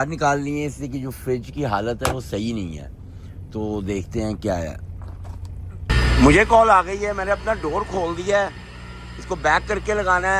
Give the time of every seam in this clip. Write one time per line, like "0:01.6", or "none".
0:05.7